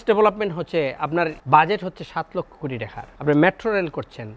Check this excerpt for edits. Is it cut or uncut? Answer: cut